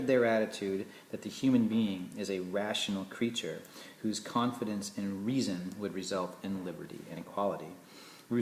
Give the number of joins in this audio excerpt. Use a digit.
1